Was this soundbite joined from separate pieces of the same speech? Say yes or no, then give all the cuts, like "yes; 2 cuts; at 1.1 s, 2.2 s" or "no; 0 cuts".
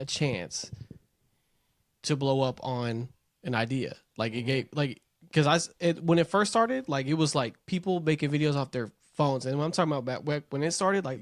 no; 0 cuts